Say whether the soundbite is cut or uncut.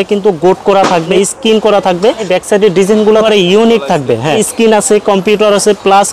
cut